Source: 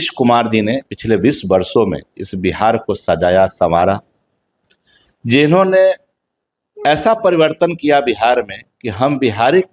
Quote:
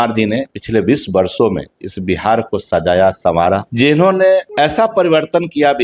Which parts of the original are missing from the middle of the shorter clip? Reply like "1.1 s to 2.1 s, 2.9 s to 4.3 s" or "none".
4.0 s to 5.2 s, 6.0 s to 6.8 s